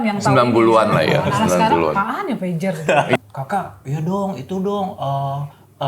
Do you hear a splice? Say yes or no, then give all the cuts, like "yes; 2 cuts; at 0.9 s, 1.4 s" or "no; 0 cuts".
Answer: yes; 1 cut; at 3.2 s